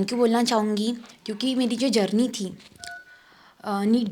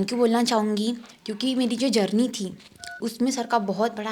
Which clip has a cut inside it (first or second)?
second